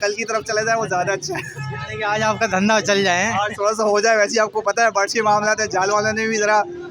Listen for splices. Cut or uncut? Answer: uncut